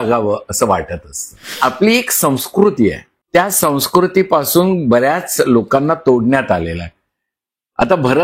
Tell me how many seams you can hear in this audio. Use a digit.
2